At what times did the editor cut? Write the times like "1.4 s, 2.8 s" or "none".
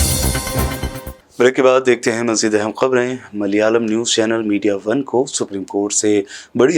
none